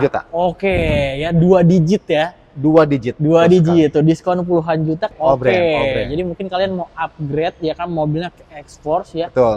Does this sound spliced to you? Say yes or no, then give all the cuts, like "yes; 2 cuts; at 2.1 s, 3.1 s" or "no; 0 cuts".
yes; 1 cut; at 5.1 s